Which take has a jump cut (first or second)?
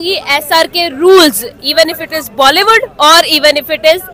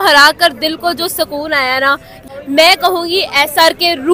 second